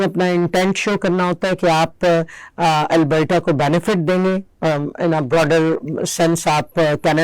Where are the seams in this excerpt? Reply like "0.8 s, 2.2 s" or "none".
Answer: none